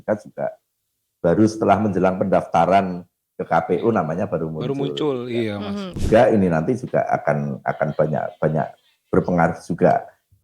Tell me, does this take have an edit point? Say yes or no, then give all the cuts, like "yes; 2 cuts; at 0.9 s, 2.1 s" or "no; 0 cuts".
yes; 1 cut; at 6.0 s